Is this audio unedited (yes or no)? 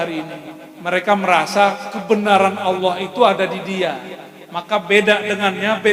yes